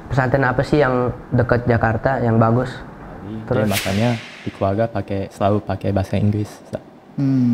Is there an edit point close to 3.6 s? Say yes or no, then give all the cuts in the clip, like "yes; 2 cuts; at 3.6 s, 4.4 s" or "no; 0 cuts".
yes; 1 cut; at 3.6 s